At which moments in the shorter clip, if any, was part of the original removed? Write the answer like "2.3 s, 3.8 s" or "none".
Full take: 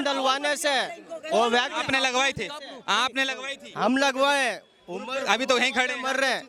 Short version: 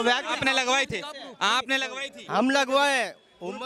none